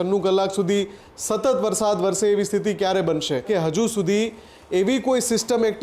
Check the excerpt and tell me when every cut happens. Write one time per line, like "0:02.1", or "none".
0:03.4